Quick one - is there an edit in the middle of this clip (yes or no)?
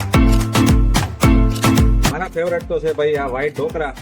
yes